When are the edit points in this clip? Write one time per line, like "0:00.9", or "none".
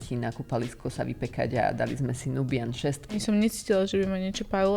0:03.2